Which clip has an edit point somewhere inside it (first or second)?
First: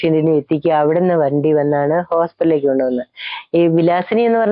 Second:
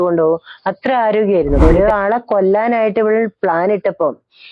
second